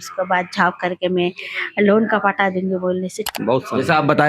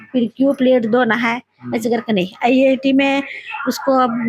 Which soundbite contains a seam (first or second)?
first